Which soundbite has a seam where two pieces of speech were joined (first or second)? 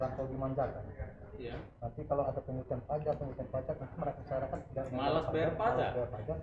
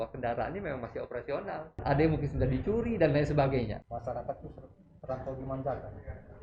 second